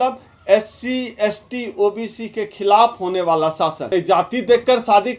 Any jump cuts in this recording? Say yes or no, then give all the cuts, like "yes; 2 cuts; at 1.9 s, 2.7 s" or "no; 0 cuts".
yes; 1 cut; at 3.8 s